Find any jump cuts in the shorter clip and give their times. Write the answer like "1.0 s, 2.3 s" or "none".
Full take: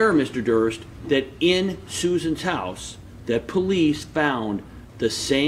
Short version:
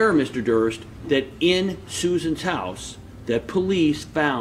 none